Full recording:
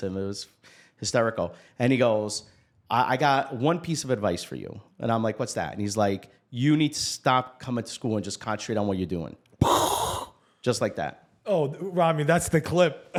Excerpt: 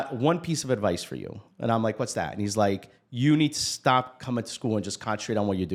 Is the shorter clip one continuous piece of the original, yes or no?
yes